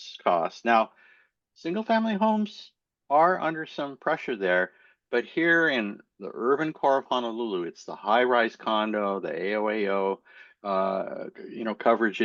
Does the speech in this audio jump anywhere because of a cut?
no; 0 cuts

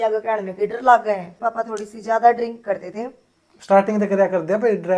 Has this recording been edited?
yes; 1 cut; at 1.3 s

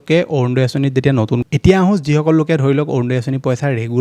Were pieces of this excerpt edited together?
yes; 1 cut; at 1.4 s

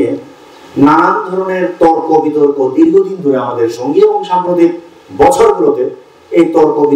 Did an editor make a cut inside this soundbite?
no; 0 cuts

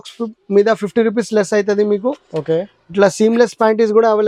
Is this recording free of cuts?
yes; 0 cuts

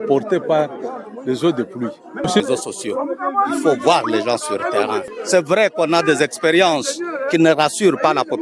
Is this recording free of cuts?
no; 1 cut; at 2.4 s

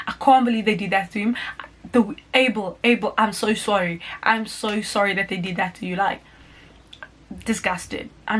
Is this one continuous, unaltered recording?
yes; 0 cuts

